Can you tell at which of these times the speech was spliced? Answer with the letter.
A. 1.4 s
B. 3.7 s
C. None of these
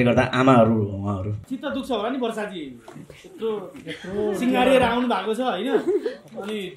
A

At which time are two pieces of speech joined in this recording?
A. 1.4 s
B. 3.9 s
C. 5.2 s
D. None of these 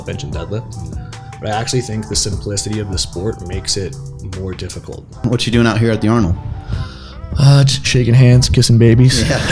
C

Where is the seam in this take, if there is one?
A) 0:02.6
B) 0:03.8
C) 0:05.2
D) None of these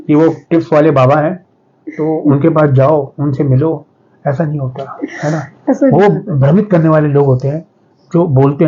D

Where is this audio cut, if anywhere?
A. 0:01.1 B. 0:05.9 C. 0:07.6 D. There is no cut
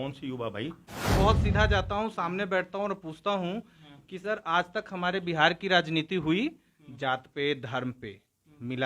A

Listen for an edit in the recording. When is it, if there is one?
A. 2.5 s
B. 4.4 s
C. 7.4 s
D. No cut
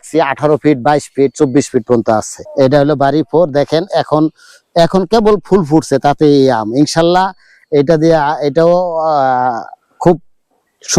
A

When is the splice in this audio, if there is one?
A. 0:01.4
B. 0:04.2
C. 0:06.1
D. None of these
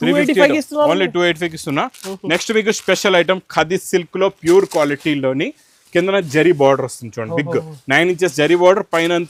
D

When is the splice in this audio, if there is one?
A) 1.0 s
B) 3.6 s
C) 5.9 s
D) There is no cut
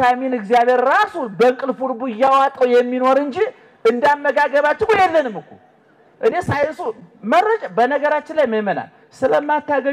D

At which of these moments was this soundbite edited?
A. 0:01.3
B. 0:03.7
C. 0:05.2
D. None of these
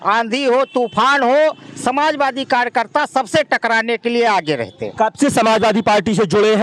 D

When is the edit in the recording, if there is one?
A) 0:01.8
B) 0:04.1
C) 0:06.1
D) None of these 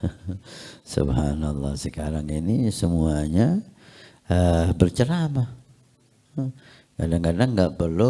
D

